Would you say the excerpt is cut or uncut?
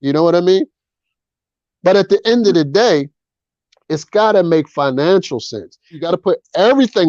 cut